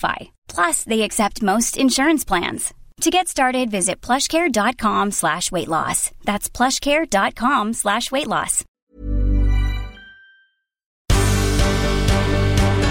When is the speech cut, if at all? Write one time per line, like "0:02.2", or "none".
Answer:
0:08.7
0:11.0

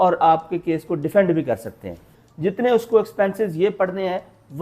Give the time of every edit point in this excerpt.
0:02.1

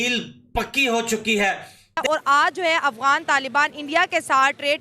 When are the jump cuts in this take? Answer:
0:02.0

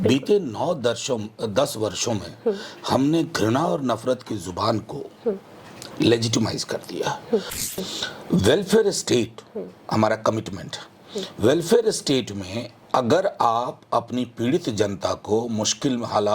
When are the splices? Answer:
0:07.7

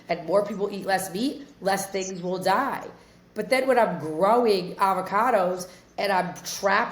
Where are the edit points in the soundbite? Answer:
none

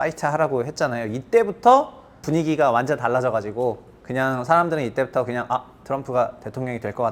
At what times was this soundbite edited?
0:02.2

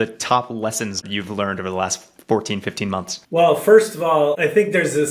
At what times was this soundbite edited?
0:01.0
0:03.2
0:04.4

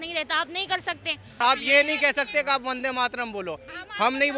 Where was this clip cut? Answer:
0:01.4

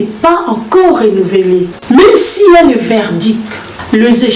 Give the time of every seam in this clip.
0:01.7

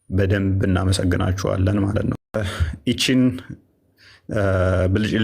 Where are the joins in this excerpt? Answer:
0:02.3

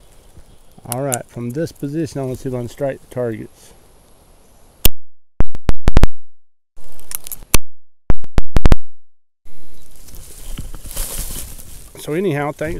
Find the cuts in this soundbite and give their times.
0:07.4

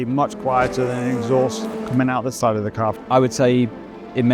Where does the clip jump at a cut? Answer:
0:03.0

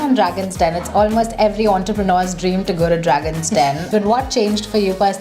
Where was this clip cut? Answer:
0:03.9

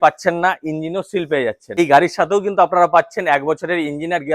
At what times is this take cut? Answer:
0:01.7

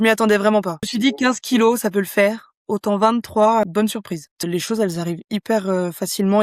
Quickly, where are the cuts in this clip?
0:00.9
0:04.4

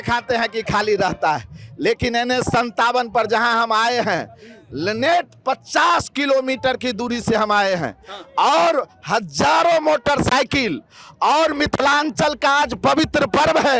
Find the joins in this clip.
none

